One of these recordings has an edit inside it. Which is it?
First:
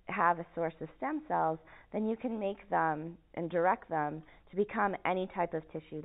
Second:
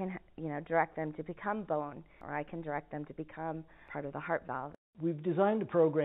second; 3 cuts; at 2.2 s, 3.8 s, 4.8 s

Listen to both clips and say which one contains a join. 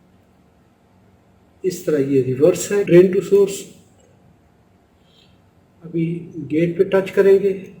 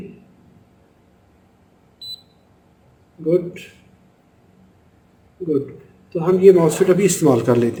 first; 1 cut; at 2.9 s

